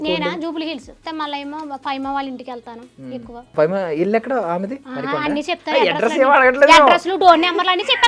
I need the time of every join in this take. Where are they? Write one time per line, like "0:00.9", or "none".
0:01.0
0:03.5
0:04.8